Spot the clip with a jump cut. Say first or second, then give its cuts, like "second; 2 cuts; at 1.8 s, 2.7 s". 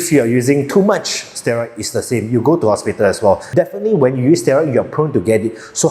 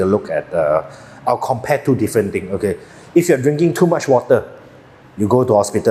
first; 1 cut; at 3.4 s